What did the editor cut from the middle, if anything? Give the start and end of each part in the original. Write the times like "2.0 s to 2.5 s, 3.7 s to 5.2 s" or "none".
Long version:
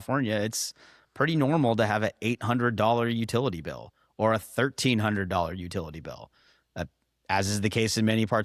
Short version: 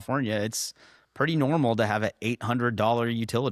none